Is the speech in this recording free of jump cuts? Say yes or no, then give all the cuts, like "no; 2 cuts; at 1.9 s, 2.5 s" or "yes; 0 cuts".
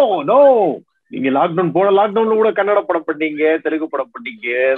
yes; 0 cuts